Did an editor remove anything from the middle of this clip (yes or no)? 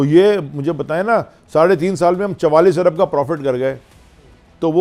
no